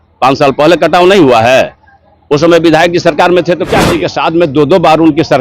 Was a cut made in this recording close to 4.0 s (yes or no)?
yes